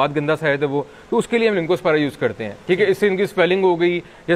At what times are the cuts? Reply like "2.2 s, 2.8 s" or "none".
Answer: none